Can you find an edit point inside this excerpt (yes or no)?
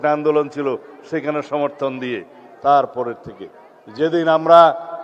no